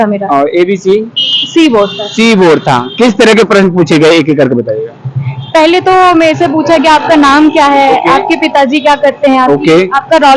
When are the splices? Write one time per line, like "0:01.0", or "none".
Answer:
none

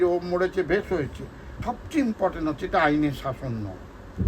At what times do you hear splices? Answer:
0:01.5

